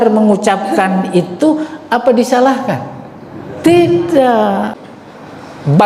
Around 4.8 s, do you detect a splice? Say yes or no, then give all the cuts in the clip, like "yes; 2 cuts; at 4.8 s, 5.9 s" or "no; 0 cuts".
yes; 1 cut; at 4.8 s